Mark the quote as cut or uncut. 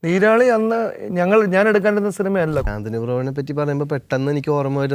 cut